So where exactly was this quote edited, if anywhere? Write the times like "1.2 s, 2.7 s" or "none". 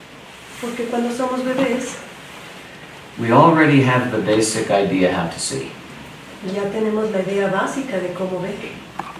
5.0 s